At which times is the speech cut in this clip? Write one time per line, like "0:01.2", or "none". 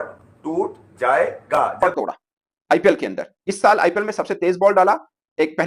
0:01.8

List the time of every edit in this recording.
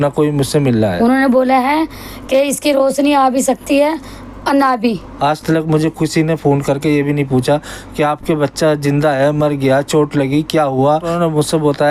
0:00.9
0:05.1
0:11.1

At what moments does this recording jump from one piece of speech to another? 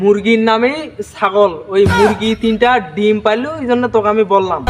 none

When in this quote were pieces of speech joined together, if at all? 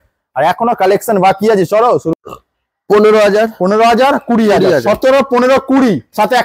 0:02.2

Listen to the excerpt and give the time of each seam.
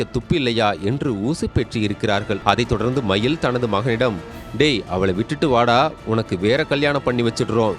0:02.4

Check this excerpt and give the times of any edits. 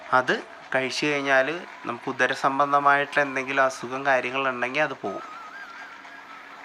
none

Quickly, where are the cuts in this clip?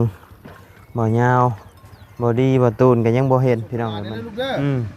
0:03.9

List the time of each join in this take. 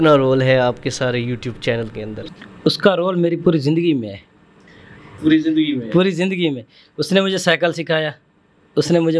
none

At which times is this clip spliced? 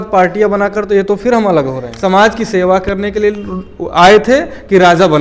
0:01.9

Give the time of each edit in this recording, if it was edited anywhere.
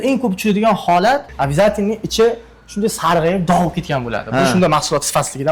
none

